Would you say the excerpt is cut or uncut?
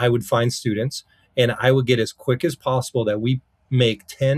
uncut